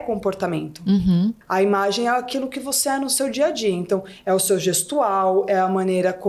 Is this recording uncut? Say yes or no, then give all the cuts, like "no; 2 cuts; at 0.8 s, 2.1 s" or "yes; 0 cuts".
no; 1 cut; at 1.4 s